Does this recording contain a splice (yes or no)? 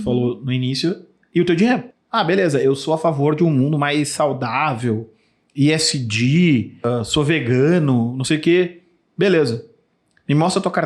yes